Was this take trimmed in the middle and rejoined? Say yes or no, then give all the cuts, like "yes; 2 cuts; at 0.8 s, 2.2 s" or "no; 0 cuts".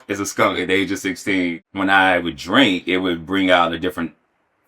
yes; 1 cut; at 1.6 s